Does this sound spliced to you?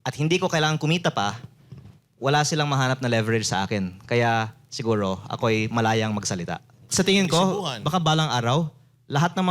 yes; 1 cut; at 6.8 s

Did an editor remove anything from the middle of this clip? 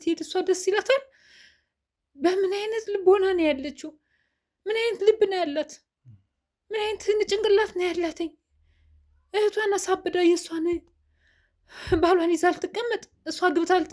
no; 0 cuts

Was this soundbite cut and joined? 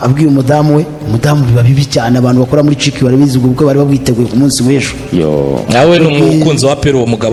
no; 0 cuts

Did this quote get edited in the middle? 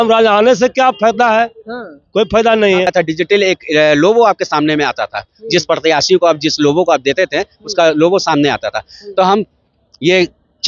yes; 1 cut; at 2.9 s

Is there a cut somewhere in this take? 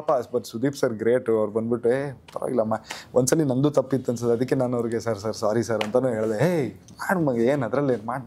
no; 0 cuts

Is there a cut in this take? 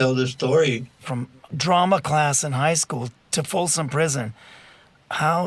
yes; 2 cuts; at 1.4 s, 3.2 s

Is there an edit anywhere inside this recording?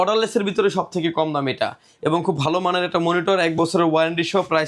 no; 0 cuts

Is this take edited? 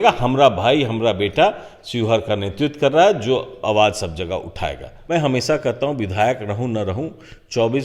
yes; 1 cut; at 4.9 s

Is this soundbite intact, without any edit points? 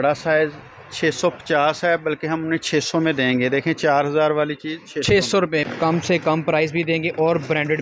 no; 1 cut; at 5.7 s

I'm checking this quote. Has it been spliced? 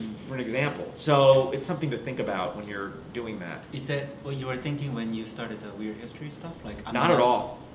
no; 0 cuts

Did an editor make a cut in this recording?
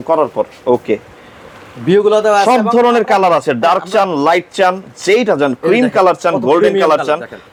no; 0 cuts

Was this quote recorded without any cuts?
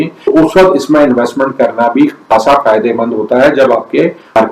yes; 0 cuts

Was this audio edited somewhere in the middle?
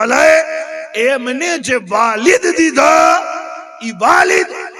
no; 0 cuts

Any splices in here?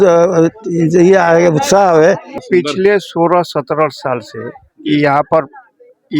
yes; 1 cut; at 2.4 s

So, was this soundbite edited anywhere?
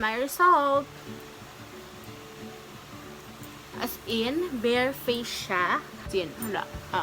yes; 1 cut; at 5.9 s

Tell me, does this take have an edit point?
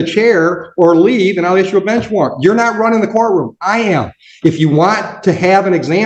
no; 0 cuts

